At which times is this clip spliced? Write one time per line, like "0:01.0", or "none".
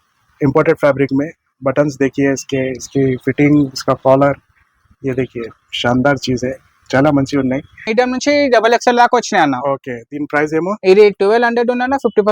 0:08.2